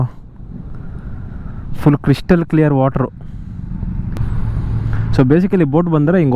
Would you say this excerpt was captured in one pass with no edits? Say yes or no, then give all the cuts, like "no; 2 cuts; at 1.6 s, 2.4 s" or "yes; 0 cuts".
no; 1 cut; at 4.2 s